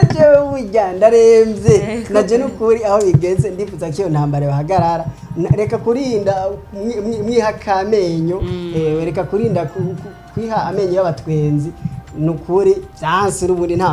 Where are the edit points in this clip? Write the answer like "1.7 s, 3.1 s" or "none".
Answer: 12.9 s